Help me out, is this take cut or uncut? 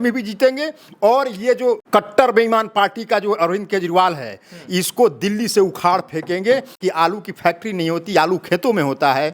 cut